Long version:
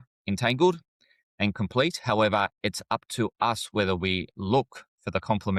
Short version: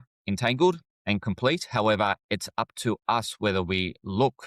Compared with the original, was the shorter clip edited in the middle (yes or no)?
yes